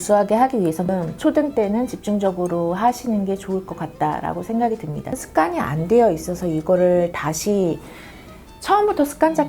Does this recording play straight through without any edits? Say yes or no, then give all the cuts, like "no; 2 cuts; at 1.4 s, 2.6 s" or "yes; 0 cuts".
no; 2 cuts; at 0.9 s, 5.2 s